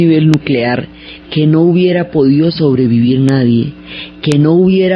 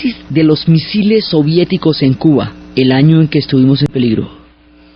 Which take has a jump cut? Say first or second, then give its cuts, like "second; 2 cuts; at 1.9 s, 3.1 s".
first; 1 cut; at 2.5 s